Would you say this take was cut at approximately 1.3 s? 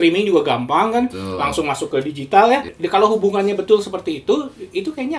no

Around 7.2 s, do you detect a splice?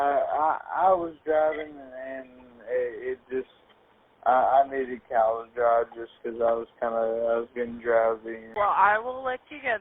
no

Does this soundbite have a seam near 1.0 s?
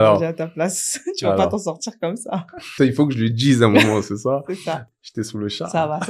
no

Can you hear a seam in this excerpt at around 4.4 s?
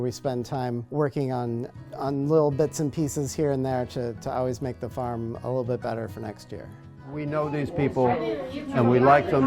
no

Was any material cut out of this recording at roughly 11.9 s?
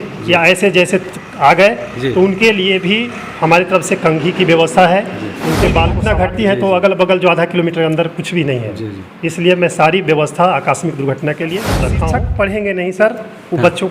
yes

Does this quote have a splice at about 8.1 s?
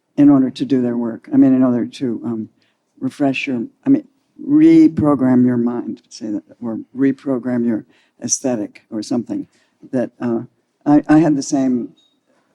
no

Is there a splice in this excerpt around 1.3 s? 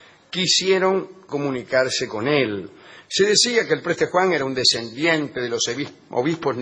no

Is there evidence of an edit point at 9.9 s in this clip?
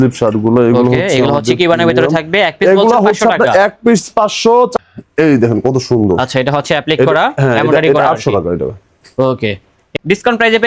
yes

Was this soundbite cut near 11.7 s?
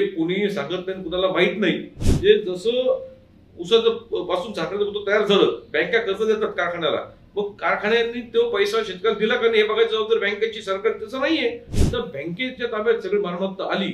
yes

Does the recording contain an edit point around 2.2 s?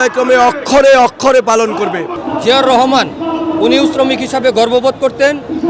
yes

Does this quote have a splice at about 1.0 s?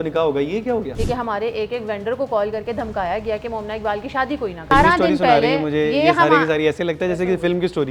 yes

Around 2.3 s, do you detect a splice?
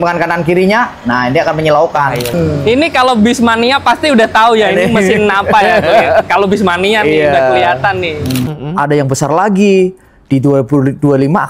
yes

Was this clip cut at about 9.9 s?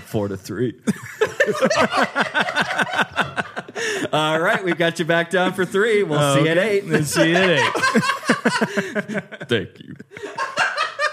yes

